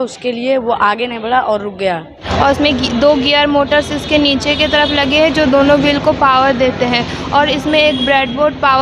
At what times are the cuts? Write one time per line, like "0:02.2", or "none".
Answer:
0:02.2